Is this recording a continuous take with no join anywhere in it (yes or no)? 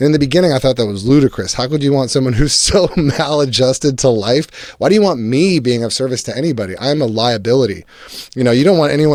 yes